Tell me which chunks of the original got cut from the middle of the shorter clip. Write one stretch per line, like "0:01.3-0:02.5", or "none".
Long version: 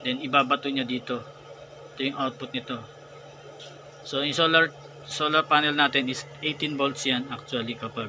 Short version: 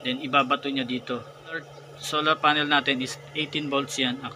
0:01.8-0:04.9